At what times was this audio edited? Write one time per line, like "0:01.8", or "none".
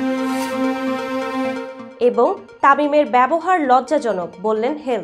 0:01.8